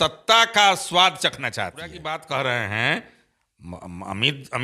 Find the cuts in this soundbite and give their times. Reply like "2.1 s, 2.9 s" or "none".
2.1 s

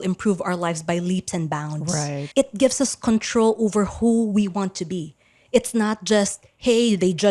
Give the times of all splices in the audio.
2.2 s

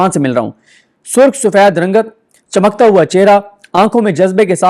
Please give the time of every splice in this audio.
none

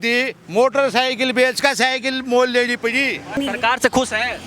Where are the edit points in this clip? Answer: 3.4 s

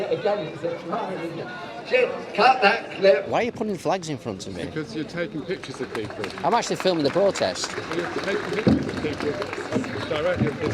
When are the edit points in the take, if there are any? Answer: 3.3 s

